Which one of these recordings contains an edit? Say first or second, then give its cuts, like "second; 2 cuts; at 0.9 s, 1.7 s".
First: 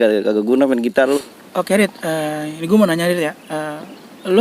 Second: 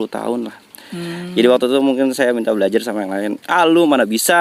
first; 1 cut; at 1.2 s